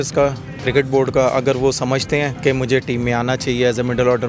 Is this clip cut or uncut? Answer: cut